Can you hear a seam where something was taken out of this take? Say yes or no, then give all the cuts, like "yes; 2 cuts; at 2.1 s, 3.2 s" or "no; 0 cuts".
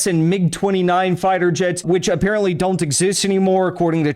yes; 1 cut; at 1.8 s